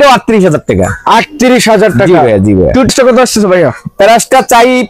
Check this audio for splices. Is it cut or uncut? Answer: cut